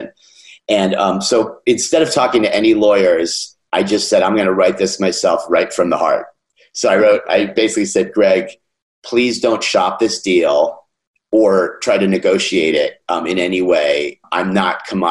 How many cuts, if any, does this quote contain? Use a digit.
1